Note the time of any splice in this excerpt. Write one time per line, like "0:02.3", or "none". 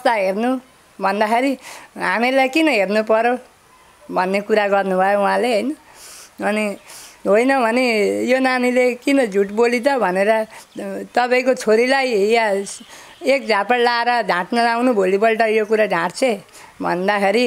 none